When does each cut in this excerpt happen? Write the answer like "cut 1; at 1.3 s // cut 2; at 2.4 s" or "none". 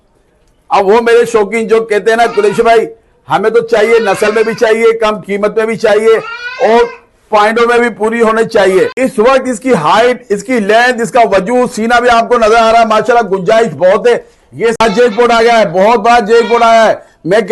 cut 1; at 9.1 s // cut 2; at 14.9 s